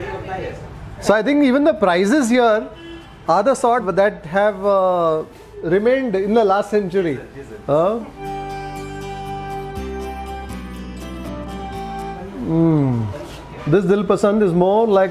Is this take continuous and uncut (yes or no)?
yes